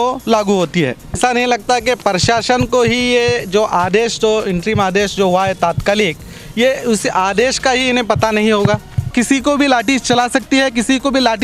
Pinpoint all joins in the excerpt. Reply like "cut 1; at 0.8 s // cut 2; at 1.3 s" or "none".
cut 1; at 1.2 s // cut 2; at 9.1 s